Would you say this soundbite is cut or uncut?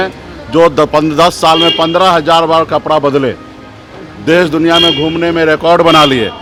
uncut